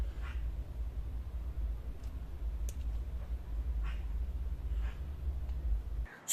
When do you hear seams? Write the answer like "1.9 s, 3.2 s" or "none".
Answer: none